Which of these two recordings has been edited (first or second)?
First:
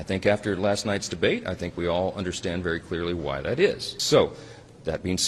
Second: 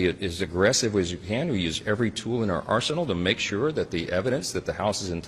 first